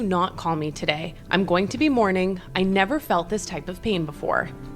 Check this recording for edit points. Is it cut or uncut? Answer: uncut